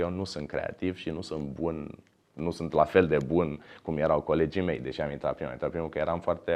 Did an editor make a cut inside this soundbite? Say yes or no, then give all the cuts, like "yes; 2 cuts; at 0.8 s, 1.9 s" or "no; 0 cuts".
no; 0 cuts